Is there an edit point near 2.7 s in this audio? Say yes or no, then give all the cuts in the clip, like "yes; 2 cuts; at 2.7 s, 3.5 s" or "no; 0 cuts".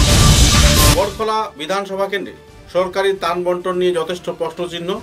no; 1 cut; at 0.9 s